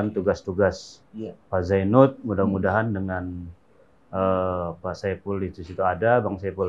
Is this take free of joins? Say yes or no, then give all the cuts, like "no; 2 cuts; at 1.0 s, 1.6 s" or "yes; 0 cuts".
yes; 0 cuts